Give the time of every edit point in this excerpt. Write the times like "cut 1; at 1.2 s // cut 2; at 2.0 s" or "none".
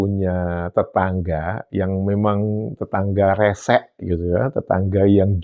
none